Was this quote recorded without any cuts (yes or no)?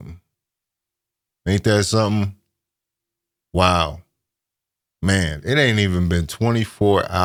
yes